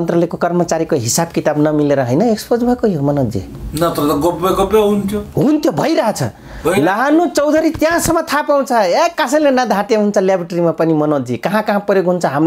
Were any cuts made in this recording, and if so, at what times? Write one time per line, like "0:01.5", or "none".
none